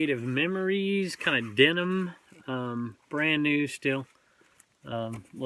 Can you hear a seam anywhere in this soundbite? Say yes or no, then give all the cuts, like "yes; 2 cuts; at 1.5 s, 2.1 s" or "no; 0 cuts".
no; 0 cuts